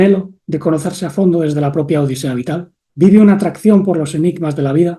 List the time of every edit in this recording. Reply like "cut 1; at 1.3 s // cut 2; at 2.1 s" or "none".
cut 1; at 2.8 s